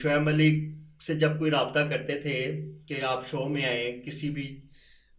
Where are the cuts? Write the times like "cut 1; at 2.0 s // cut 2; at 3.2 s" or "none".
none